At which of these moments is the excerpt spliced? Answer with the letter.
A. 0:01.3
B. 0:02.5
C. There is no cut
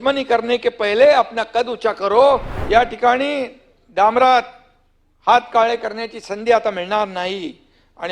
B